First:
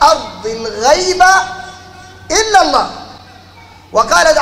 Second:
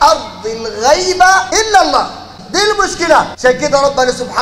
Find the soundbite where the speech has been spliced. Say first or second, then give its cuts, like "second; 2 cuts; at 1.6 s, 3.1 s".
second; 3 cuts; at 1.5 s, 2.4 s, 3.3 s